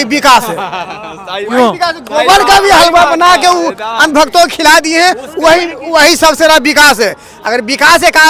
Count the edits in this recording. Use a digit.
0